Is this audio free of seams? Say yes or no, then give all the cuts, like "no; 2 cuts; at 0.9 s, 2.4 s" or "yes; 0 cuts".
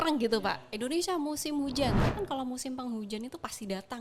no; 1 cut; at 2.1 s